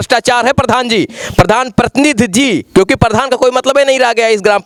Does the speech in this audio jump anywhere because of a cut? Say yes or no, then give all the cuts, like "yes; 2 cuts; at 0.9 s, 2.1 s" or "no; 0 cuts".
no; 0 cuts